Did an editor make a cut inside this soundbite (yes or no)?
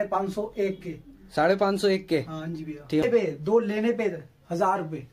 yes